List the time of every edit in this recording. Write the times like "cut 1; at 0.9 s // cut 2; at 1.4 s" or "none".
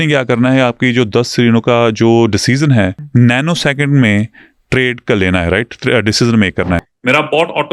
cut 1; at 3.0 s // cut 2; at 6.8 s